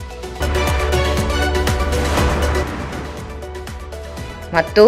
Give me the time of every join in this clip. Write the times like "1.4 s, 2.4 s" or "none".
3.2 s